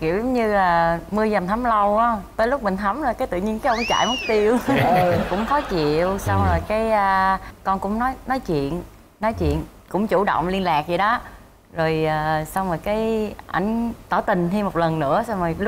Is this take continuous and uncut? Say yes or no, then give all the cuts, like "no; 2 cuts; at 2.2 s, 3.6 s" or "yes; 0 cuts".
yes; 0 cuts